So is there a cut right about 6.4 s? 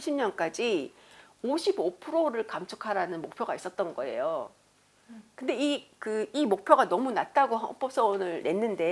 no; 0 cuts

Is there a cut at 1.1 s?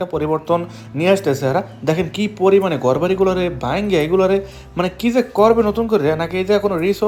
no; 0 cuts

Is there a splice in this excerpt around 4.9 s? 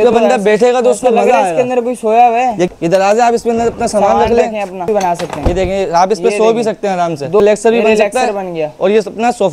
yes; 3 cuts; at 2.7 s, 4.9 s, 7.4 s

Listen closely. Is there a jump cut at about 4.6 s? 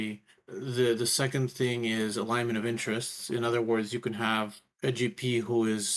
yes; 1 cut; at 4.6 s

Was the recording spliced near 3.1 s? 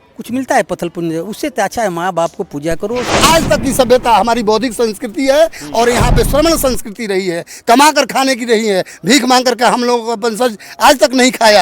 yes; 1 cut; at 3.1 s

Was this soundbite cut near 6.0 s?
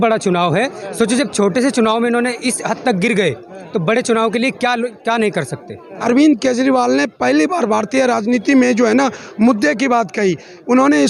yes; 1 cut; at 6.0 s

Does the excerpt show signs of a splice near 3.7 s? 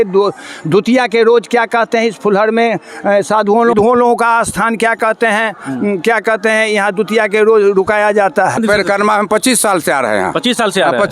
yes; 2 cuts; at 3.7 s, 8.6 s

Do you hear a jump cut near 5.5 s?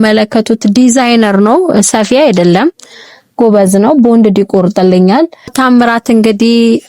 yes; 1 cut; at 5.5 s

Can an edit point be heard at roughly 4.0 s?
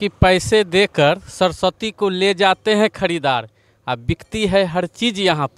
no; 0 cuts

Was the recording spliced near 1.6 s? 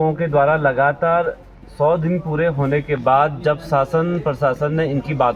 no; 0 cuts

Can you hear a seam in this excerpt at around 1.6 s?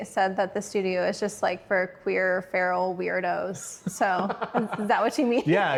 no; 0 cuts

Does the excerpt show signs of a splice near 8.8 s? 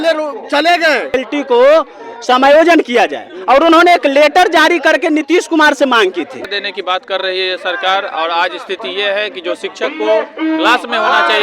no; 2 cuts; at 1.1 s, 6.6 s

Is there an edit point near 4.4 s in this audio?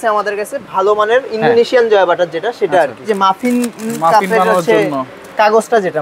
no; 1 cut; at 3.1 s

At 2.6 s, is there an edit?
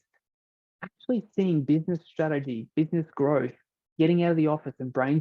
yes; 1 cut; at 2.6 s

